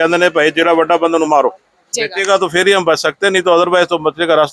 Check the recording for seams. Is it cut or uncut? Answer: cut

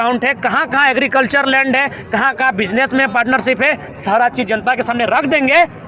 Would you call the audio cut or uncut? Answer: uncut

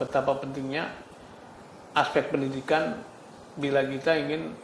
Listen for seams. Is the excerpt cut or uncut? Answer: uncut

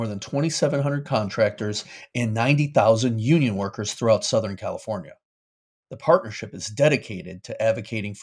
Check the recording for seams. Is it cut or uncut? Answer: uncut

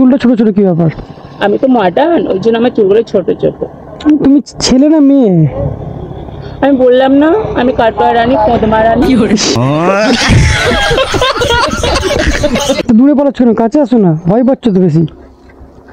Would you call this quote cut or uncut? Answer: uncut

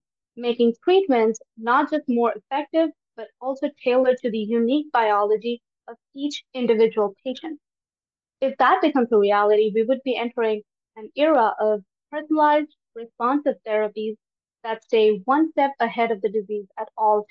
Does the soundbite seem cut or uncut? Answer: uncut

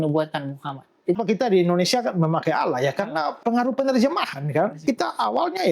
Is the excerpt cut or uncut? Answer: cut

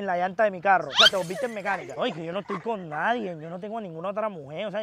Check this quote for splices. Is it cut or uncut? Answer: uncut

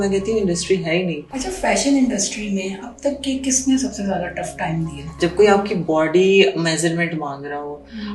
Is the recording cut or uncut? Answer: cut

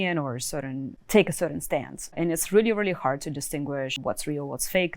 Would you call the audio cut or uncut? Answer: cut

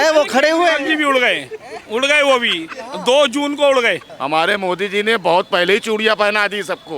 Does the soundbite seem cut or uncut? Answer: cut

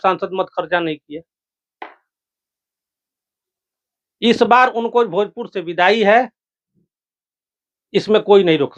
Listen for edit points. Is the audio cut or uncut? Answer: uncut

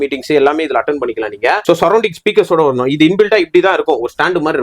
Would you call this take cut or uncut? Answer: cut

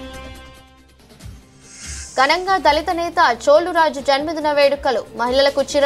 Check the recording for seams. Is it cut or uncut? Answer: cut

